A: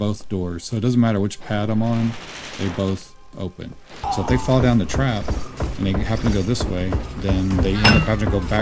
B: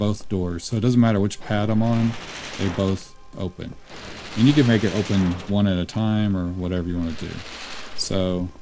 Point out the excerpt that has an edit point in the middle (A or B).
A